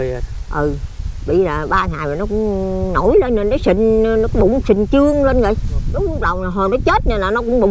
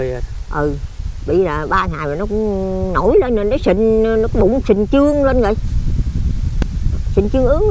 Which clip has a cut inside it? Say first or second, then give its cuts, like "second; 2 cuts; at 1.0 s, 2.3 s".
first; 1 cut; at 5.8 s